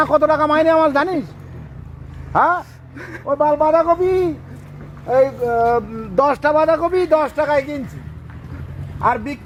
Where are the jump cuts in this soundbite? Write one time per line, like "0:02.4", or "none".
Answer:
none

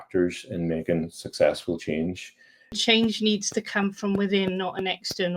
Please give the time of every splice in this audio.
0:02.8

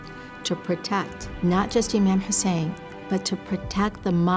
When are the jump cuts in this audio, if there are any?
0:01.2

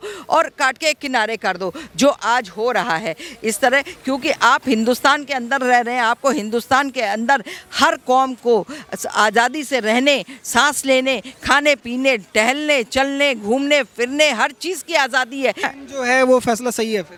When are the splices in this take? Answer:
none

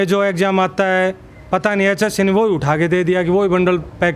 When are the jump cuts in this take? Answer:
none

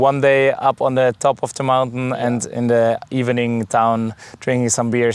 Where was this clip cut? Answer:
none

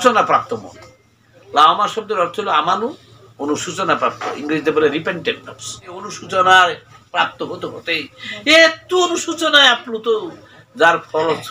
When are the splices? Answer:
0:06.2

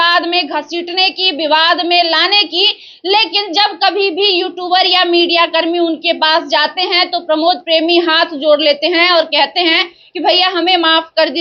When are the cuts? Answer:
none

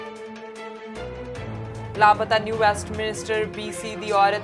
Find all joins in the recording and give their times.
0:01.8

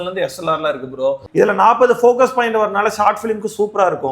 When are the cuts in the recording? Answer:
0:01.2

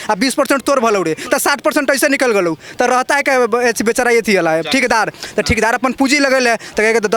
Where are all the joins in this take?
none

